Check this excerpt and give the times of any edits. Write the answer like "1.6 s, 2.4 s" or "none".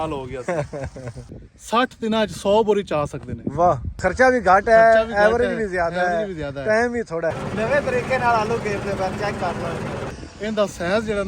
1.1 s, 3.9 s, 7.4 s, 10.2 s